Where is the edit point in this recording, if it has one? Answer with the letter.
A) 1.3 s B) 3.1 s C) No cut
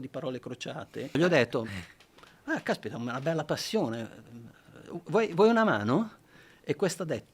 A